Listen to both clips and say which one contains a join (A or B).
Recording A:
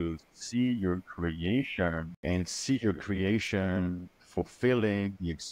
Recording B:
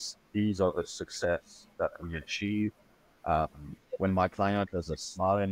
A